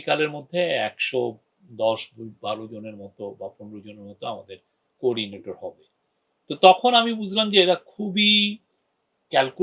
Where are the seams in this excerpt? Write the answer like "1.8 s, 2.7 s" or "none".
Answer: none